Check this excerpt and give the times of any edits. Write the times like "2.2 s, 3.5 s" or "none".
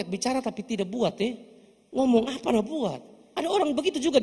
3.3 s

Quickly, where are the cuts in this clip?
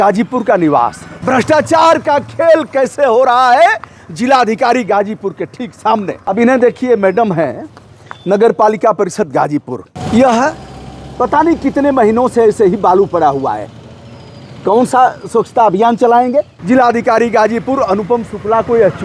1.1 s, 6.3 s, 9.9 s, 16.6 s

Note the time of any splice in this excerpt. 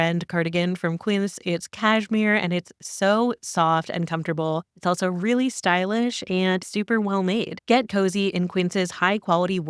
6.7 s

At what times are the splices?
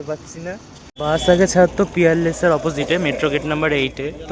0.9 s

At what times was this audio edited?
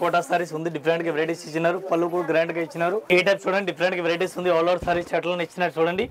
3.0 s

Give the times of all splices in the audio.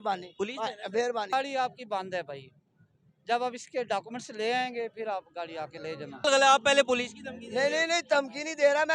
1.3 s, 6.3 s

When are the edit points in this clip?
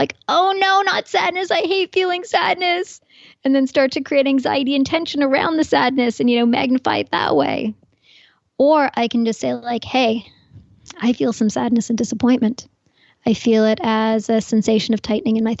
none

